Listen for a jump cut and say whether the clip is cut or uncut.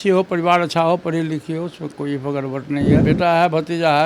cut